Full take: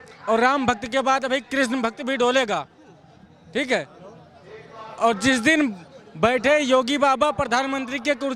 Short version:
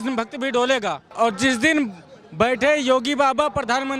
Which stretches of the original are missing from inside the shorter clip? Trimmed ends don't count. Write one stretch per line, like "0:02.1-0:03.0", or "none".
0:02.7-0:04.9